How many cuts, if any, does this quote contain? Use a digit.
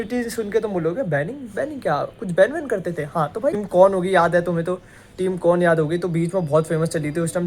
1